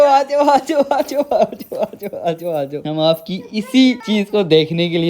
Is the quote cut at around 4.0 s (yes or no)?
yes